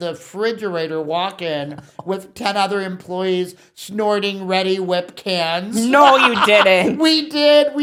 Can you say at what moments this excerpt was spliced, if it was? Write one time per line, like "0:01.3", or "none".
none